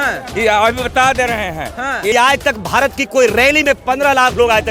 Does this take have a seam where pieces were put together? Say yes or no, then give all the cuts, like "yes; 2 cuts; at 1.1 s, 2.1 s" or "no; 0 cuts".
yes; 1 cut; at 2.1 s